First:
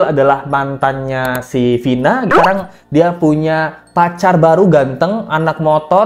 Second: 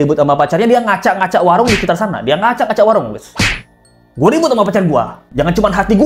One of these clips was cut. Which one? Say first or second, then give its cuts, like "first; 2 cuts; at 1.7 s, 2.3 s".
first; 1 cut; at 2.3 s